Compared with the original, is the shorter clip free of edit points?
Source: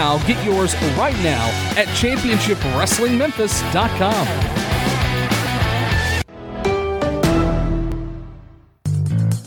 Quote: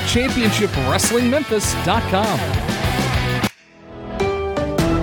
no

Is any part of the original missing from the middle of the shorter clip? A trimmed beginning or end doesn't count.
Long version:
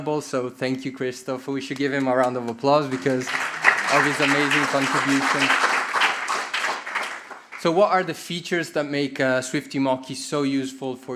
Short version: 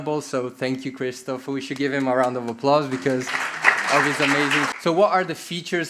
yes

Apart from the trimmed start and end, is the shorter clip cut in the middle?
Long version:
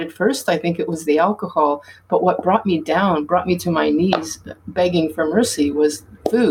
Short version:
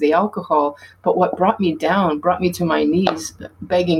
no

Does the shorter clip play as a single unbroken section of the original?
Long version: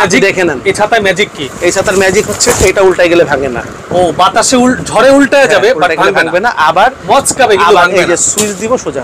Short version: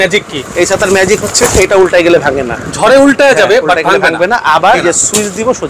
no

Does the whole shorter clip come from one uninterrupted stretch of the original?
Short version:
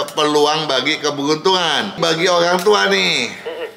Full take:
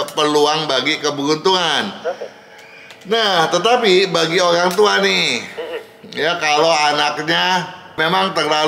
no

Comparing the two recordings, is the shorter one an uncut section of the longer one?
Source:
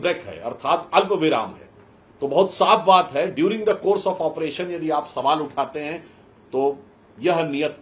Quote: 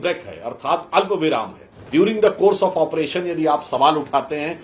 no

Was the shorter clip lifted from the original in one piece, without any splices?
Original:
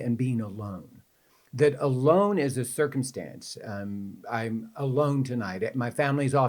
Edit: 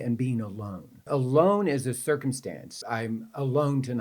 no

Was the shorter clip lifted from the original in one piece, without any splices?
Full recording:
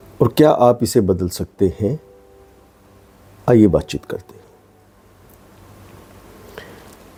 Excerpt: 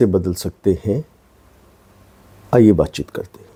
yes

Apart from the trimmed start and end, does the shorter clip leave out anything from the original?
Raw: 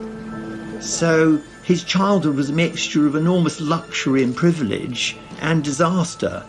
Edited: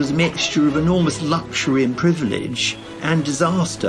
no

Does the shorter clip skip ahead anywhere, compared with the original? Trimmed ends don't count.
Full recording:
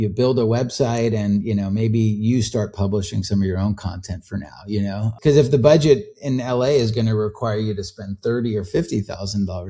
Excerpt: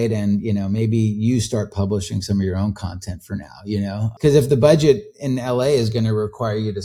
no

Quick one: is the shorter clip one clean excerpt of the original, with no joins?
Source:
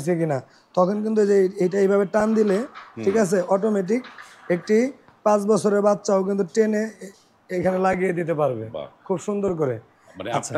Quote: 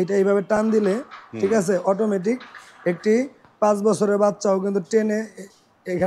yes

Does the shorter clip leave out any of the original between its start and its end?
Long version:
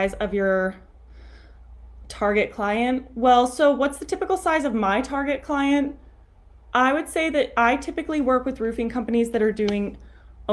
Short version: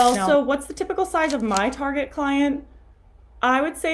no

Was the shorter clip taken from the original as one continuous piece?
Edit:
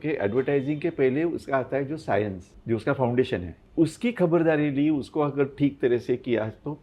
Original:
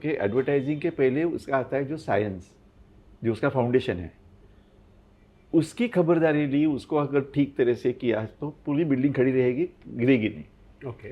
no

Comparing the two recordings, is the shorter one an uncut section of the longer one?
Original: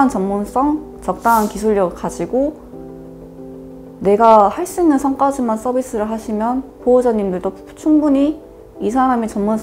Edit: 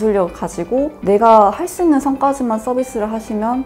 no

